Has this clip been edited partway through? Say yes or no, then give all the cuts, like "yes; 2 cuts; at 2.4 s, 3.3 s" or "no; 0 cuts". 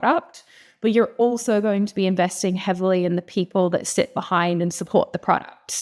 no; 0 cuts